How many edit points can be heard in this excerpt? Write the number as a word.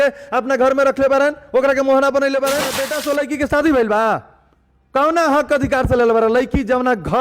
one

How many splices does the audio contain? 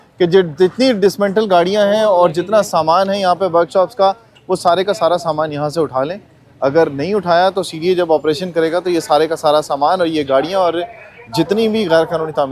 zero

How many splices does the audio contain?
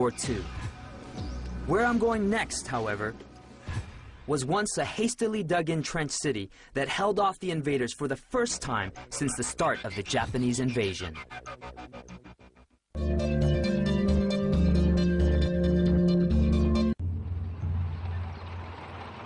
one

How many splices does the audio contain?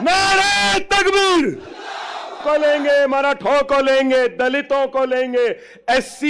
one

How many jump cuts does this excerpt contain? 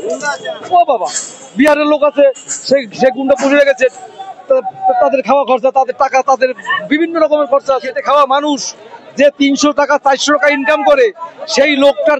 one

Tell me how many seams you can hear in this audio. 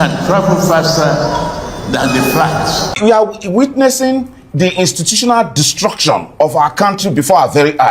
one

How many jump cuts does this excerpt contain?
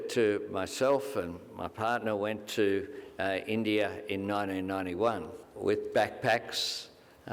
one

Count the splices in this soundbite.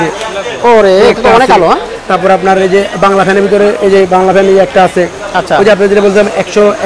zero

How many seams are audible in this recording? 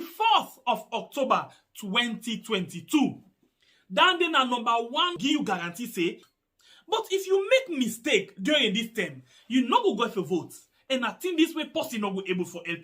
two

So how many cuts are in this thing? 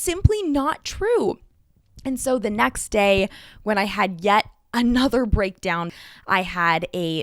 one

